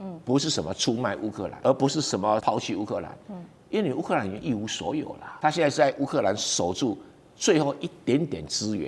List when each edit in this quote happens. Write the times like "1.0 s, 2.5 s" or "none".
1.5 s, 2.4 s, 5.2 s